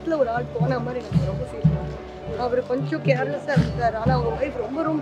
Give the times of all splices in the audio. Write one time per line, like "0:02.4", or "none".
0:02.3